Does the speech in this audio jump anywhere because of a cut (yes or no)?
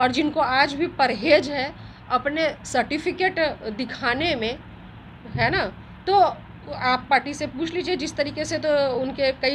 no